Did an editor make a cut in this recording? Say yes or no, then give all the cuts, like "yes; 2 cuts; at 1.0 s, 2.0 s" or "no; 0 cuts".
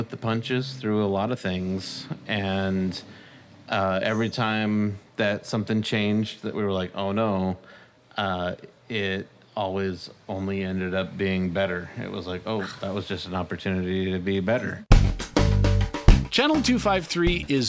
yes; 1 cut; at 14.8 s